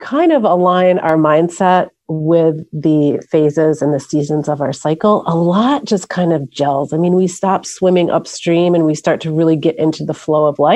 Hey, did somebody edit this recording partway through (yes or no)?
no